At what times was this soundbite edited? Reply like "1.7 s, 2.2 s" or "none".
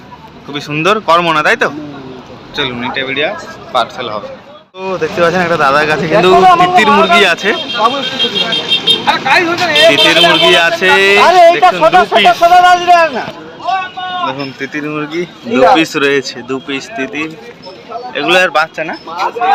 none